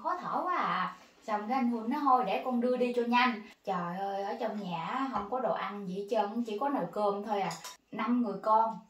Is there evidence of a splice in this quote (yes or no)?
yes